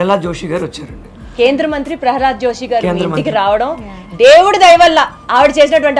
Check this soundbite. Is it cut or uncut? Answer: uncut